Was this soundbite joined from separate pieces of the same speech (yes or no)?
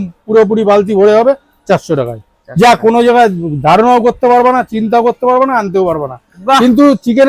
no